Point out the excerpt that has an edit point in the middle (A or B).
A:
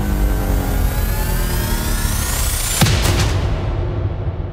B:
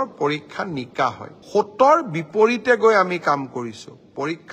B